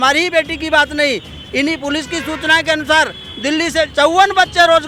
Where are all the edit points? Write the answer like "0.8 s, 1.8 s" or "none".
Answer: none